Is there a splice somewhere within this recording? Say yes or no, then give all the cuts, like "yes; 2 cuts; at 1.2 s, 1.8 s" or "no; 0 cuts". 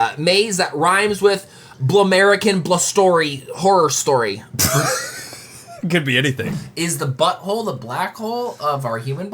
yes; 1 cut; at 6.4 s